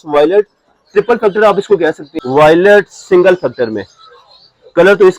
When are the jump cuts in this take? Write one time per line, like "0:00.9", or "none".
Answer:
0:02.1